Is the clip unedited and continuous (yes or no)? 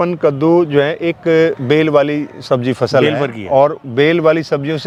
yes